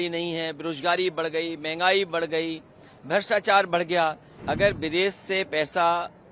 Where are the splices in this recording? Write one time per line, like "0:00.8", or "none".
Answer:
0:04.3